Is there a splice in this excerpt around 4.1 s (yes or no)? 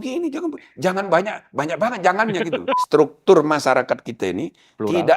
no